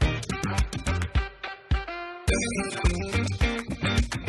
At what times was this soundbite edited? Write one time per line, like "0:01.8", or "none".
0:03.1